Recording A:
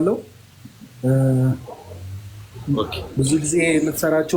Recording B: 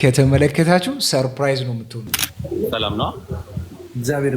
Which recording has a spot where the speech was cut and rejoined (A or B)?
B